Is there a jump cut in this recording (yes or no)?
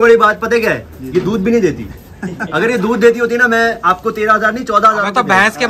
no